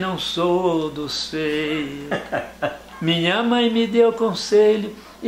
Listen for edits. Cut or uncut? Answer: cut